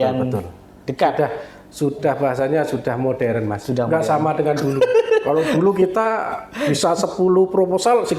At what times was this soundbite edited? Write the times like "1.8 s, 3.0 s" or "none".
none